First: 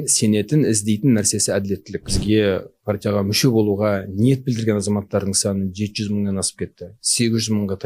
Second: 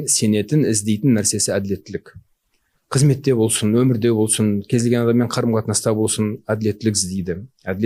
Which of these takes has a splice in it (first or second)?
first